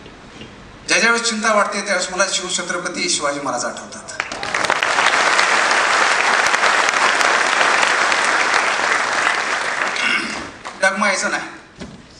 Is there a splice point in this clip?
no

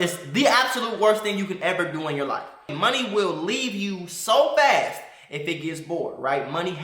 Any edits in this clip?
yes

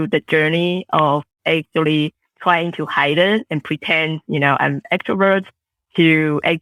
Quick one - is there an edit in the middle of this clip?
no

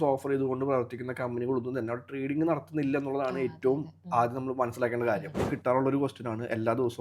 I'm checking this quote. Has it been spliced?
yes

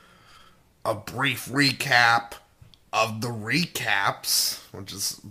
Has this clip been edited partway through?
yes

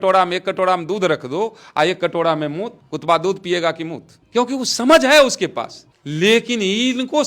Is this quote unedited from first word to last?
yes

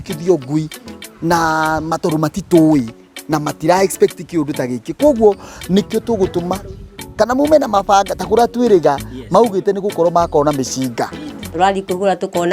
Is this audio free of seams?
yes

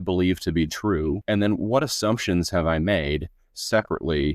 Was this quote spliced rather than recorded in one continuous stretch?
yes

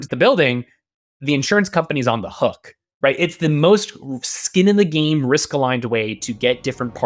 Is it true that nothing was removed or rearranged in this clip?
yes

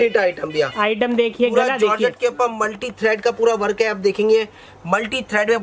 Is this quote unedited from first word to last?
yes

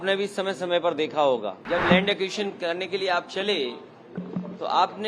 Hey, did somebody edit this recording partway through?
yes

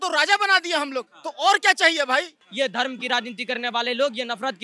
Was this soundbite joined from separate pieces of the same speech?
yes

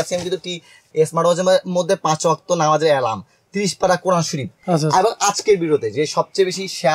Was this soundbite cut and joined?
yes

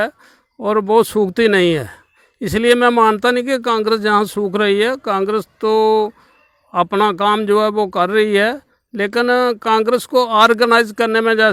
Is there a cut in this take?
no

